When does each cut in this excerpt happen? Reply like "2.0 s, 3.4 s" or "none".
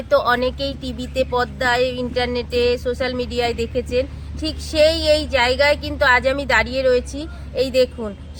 none